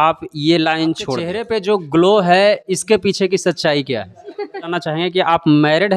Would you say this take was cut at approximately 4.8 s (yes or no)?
yes